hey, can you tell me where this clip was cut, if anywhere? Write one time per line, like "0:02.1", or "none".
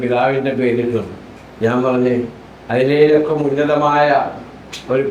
none